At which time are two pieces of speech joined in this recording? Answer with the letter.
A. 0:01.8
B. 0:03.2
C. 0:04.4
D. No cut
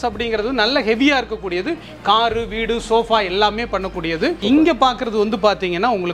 C